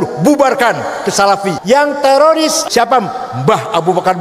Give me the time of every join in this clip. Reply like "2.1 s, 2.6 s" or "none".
1.6 s, 2.6 s

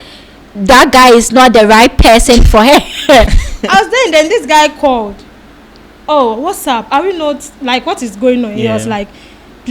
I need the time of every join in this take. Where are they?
3.4 s

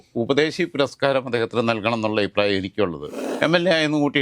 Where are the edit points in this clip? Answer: 3.2 s

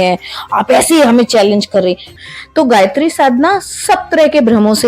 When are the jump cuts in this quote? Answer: 2.1 s

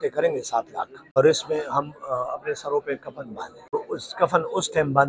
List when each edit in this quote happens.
1.2 s, 3.7 s

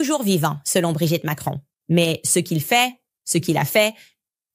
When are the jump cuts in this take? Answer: 1.7 s

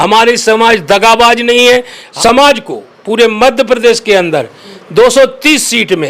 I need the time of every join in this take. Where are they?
2.0 s

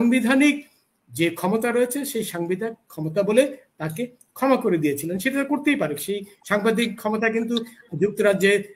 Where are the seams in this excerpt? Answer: none

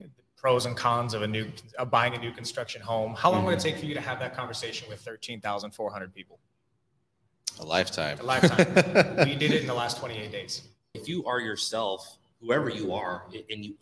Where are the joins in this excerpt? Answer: 11.0 s

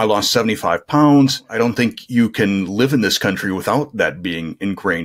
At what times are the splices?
1.4 s

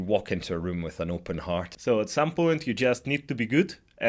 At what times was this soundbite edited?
1.7 s

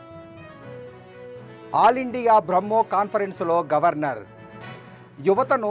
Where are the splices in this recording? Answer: 1.4 s

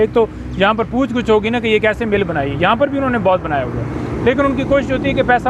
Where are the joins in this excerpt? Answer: none

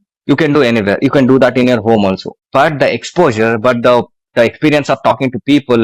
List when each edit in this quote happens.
2.3 s

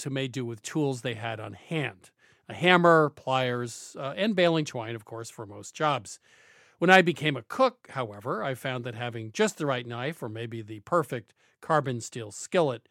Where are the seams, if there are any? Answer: none

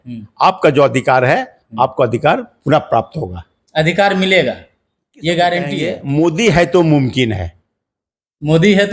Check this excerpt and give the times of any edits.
5.9 s

